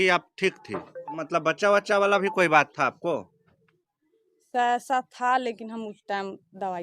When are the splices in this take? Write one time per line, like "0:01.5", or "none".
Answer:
0:01.2